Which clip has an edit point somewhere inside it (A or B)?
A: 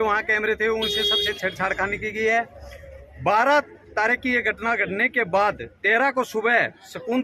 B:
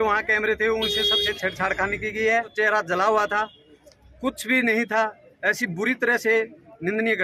B